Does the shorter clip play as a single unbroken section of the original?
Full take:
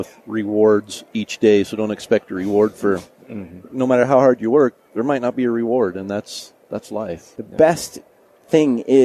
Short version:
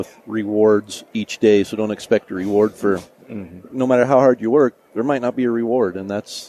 yes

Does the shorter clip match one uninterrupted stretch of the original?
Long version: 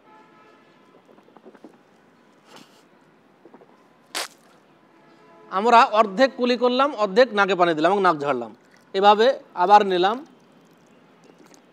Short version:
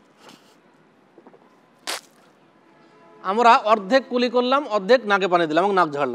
yes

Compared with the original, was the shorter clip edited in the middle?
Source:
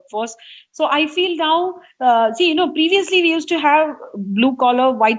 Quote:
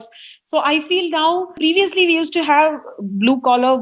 yes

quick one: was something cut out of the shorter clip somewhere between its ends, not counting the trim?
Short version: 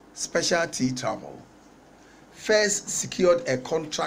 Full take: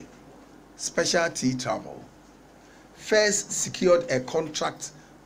no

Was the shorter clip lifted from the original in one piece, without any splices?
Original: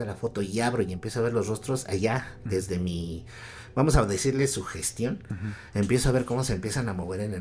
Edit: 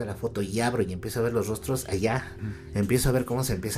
no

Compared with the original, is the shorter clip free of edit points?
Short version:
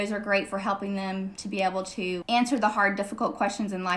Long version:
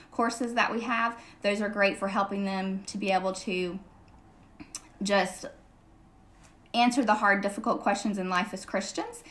no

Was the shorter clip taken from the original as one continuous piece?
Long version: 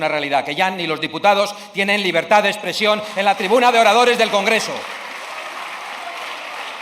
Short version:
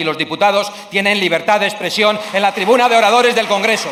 yes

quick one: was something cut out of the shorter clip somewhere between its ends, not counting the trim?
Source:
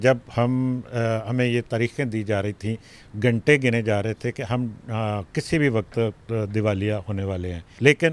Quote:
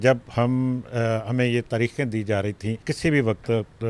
yes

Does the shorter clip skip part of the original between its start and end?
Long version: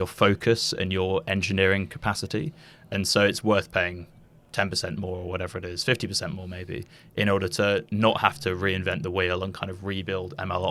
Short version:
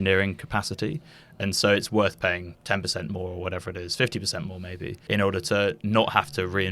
yes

